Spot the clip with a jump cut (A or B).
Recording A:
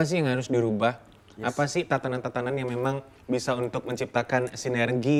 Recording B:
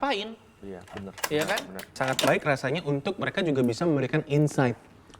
B